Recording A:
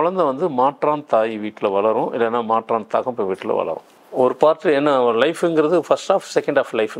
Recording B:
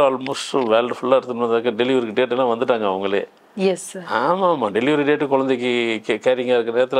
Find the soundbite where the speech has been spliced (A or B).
A